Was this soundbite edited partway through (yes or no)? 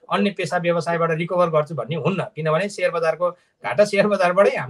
no